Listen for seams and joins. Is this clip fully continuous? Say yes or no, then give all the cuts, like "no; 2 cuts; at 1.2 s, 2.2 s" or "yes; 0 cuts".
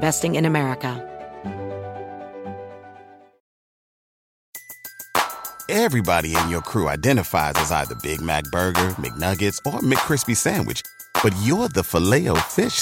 no; 1 cut; at 1.0 s